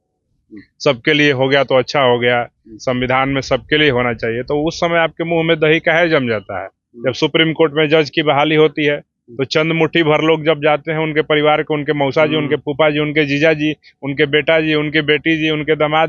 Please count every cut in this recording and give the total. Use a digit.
0